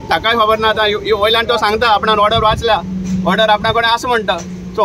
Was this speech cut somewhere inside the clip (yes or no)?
no